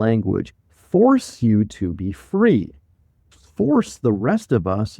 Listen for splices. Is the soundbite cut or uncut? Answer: cut